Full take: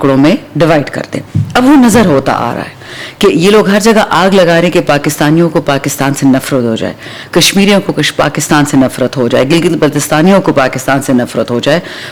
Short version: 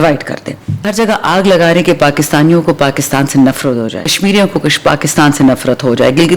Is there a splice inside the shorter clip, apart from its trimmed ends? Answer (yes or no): yes